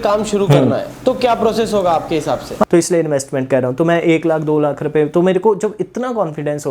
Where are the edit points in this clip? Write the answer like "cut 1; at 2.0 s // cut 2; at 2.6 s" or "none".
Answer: cut 1; at 0.9 s // cut 2; at 2.6 s